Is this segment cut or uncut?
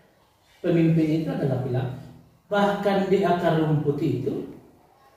cut